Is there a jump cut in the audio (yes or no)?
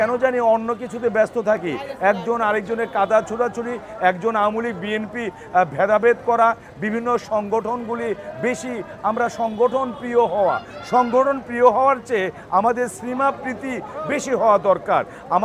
no